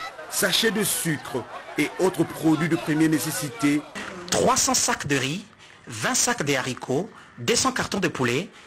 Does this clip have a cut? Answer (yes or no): yes